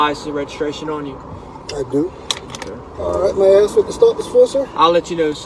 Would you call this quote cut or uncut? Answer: cut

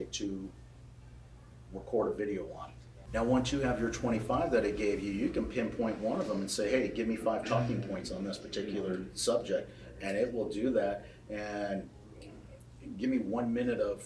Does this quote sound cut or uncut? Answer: cut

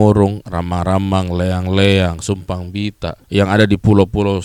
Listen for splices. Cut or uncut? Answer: cut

